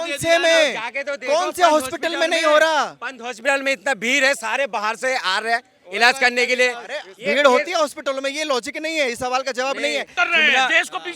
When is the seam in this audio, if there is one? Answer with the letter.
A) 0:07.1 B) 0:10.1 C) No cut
B